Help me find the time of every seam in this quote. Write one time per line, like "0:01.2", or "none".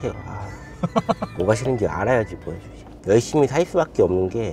0:01.3
0:03.0

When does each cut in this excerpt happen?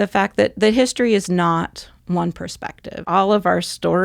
0:03.1

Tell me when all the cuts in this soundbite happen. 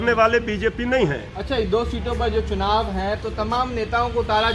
none

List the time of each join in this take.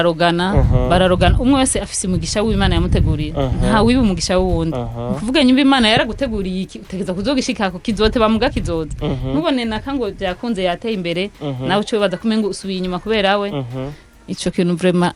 none

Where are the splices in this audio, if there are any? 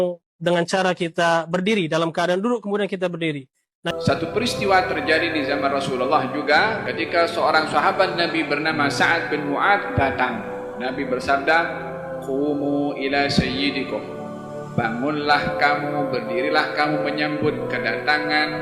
0:03.9

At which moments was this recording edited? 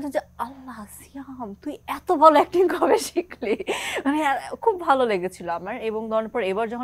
none

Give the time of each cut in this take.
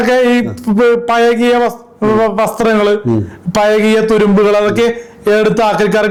none

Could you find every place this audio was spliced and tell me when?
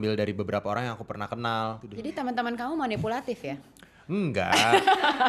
0:01.9

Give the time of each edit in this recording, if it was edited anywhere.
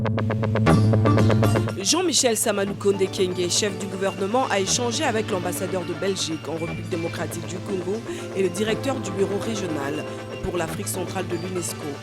0:01.8

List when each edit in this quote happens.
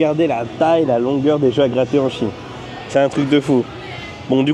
none

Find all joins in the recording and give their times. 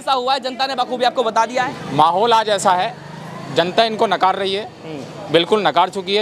0:01.7

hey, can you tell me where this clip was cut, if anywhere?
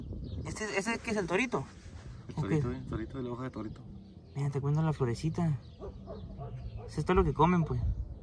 none

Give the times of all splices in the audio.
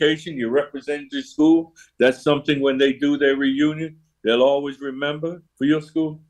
0:05.4

